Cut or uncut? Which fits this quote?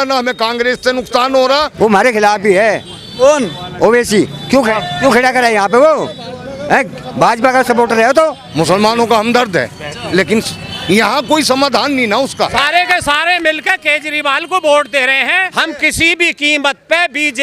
cut